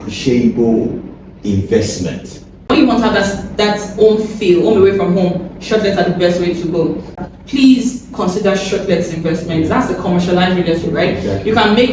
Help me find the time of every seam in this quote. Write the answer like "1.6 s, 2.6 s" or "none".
2.7 s, 7.2 s